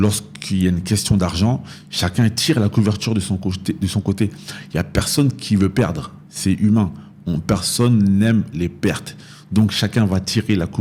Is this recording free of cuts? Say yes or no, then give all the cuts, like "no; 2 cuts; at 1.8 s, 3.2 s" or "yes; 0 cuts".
yes; 0 cuts